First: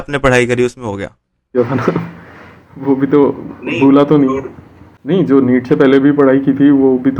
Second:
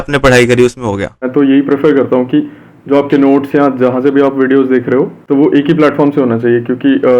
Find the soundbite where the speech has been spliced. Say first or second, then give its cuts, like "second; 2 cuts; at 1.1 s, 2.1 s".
second; 2 cuts; at 1.3 s, 5.2 s